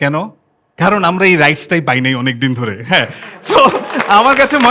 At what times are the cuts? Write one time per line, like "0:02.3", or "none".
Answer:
none